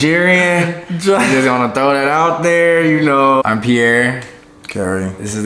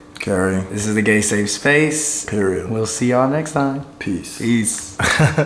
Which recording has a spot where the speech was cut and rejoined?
first; 1 cut; at 3.4 s

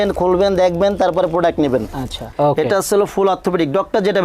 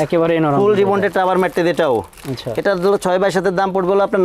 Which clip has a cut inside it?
first; 1 cut; at 2.2 s

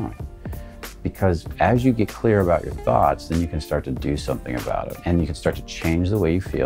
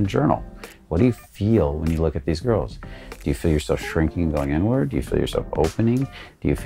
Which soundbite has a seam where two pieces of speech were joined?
first; 1 cut; at 4.9 s

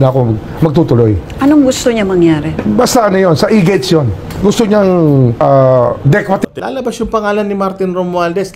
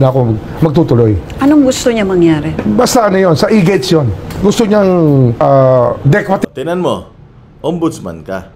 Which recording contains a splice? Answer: first; 1 cut; at 6.6 s

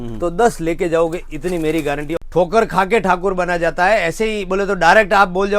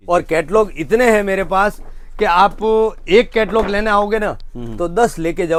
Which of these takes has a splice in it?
first; 1 cut; at 2.2 s

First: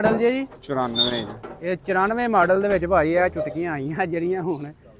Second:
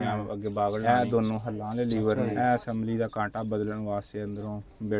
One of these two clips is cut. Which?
second; 2 cuts; at 0.8 s, 2.2 s

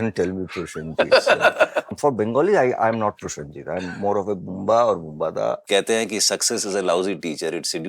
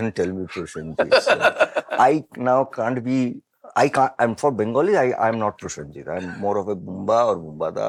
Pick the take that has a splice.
first; 2 cuts; at 1.9 s, 5.7 s

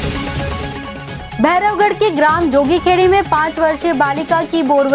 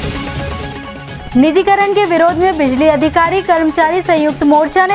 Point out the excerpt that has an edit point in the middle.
first; 1 cut; at 1.2 s

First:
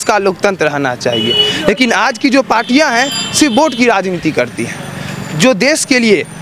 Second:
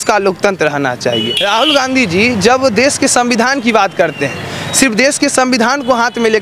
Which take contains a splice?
second; 1 cut; at 1.3 s

